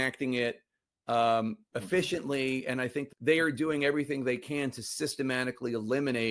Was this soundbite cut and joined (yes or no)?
yes